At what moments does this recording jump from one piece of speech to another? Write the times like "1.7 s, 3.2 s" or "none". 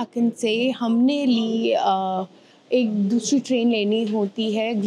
none